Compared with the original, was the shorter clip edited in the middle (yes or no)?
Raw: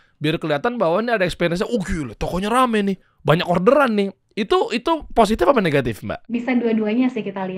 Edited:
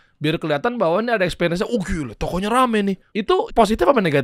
yes